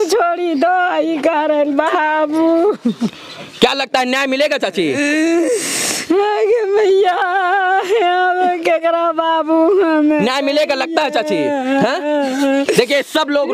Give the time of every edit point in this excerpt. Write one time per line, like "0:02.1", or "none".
none